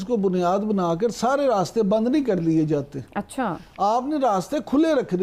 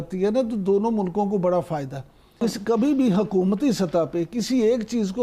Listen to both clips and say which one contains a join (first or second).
second